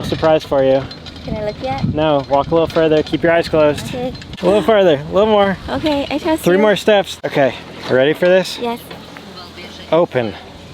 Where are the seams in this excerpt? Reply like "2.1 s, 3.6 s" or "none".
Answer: 4.2 s, 7.1 s